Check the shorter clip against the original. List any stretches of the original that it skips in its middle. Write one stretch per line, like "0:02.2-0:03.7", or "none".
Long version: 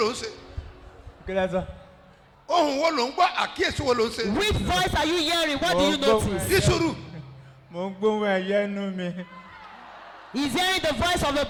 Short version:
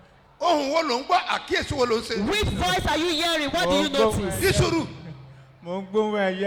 none